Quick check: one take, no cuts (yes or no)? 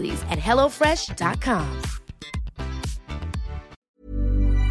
no